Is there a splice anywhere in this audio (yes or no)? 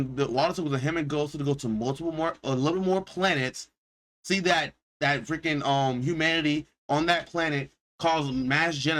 yes